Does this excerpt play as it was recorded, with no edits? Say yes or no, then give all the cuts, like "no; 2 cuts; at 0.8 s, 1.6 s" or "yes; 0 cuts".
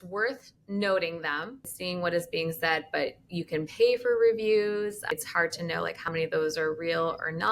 yes; 0 cuts